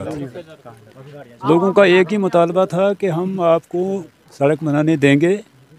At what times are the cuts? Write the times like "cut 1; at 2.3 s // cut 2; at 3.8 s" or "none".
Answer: none